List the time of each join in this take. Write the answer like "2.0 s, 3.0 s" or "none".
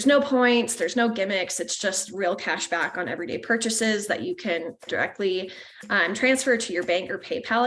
4.9 s